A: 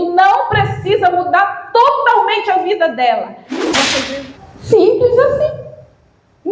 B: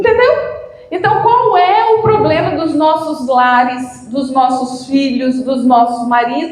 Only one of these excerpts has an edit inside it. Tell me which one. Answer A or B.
A